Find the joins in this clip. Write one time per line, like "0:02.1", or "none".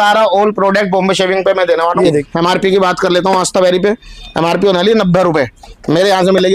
0:02.3